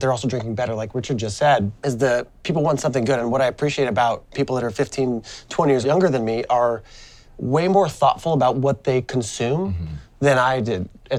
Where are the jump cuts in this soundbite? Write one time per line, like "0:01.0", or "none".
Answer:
none